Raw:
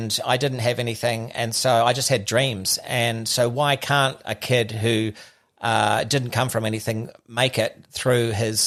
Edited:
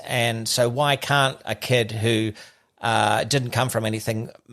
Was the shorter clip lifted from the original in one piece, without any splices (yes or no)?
yes